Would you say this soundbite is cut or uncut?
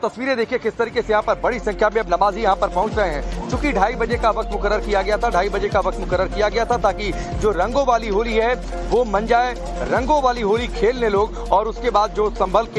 uncut